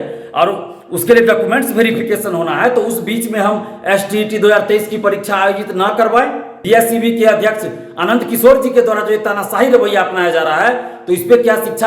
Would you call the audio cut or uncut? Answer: cut